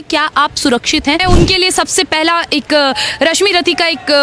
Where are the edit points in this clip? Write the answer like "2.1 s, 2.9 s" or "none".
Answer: 1.2 s

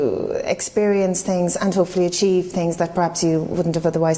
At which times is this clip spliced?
none

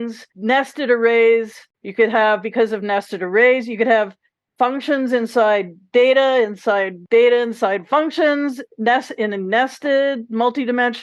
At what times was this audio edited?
1.7 s

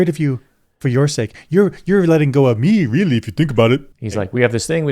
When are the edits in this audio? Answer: 4.0 s

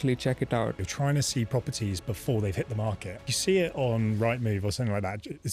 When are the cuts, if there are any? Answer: 0.8 s, 3.2 s

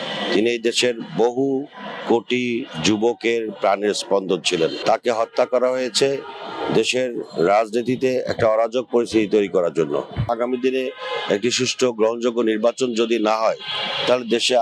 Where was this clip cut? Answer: 4.8 s, 10.2 s

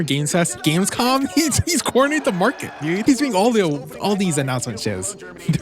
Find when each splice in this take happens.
3.0 s

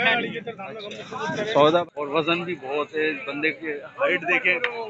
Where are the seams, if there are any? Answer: 1.8 s

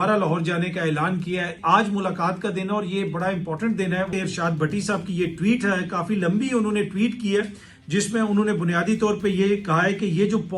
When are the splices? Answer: 1.6 s, 4.1 s

